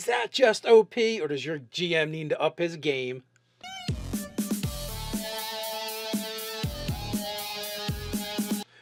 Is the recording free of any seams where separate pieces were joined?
yes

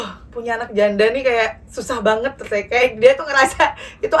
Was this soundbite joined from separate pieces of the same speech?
no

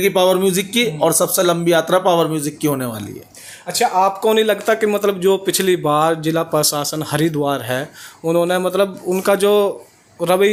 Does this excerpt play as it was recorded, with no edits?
yes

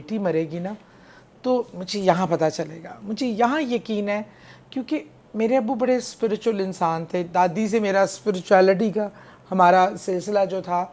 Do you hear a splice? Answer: no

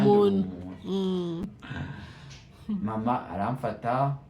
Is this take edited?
yes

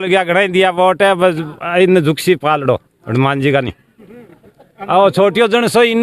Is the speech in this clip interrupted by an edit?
no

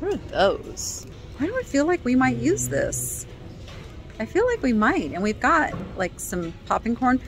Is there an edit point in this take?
yes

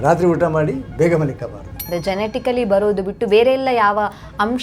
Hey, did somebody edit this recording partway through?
yes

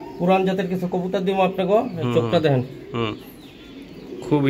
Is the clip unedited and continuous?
yes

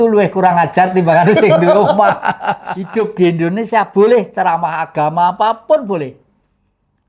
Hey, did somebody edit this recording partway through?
yes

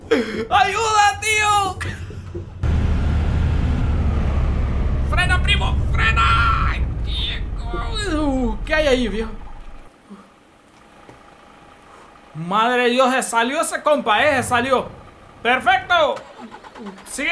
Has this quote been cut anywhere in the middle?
yes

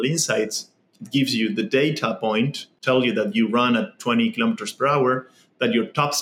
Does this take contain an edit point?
yes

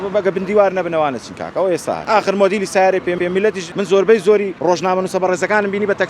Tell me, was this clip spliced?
yes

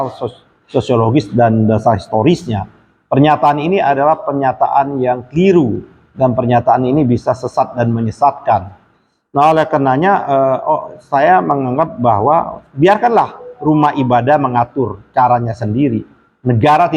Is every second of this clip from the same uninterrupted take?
yes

